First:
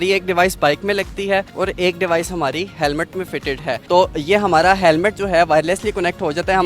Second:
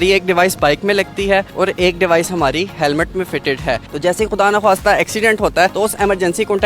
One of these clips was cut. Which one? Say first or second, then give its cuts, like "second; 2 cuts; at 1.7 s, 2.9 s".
second; 2 cuts; at 3.8 s, 5.7 s